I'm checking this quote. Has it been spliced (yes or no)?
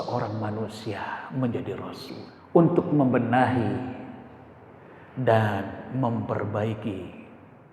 yes